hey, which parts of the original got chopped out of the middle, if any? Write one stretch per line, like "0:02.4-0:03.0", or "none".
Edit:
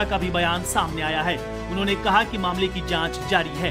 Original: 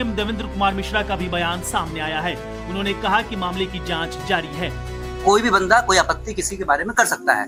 none

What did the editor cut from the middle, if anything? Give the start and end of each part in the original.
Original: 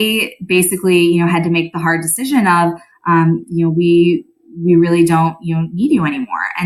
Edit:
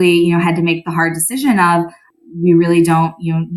0:02.9-0:04.3

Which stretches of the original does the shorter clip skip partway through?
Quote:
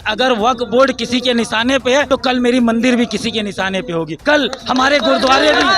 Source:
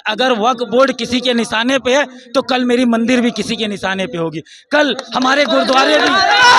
0:02.1-0:02.3
0:04.4-0:04.6

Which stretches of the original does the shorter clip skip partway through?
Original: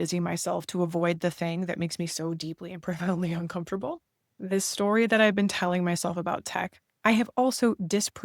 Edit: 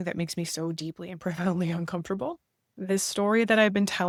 none

